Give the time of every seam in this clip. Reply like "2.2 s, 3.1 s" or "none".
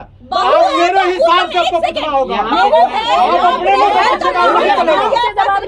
none